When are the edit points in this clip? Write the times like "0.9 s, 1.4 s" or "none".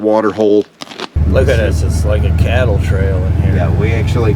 1.0 s